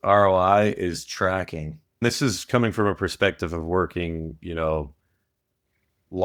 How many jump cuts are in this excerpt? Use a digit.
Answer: 1